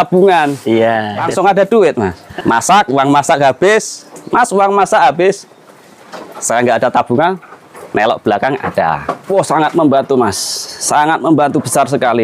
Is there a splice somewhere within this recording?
yes; 3 cuts; at 1.2 s, 2.2 s, 9.1 s

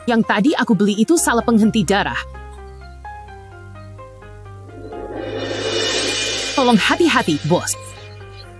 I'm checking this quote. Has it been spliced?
yes; 3 cuts; at 2.8 s, 4.7 s, 7.7 s

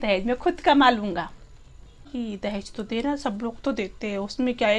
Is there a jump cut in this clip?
yes; 1 cut; at 2.1 s

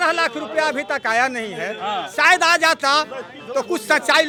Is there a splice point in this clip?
no; 0 cuts

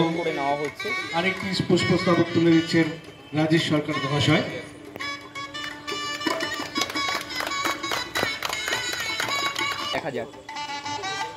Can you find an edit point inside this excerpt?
yes; 1 cut; at 9.9 s

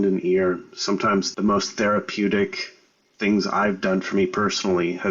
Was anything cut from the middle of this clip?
yes; 1 cut; at 1.3 s

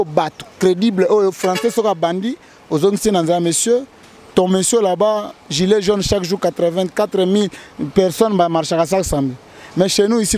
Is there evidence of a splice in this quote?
no; 0 cuts

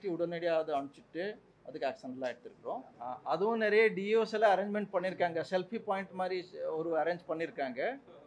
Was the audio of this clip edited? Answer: yes; 1 cut; at 2.9 s

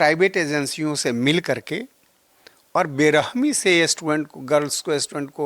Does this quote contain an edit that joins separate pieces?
no; 0 cuts

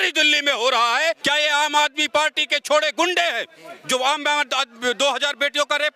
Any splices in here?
yes; 1 cut; at 1.2 s

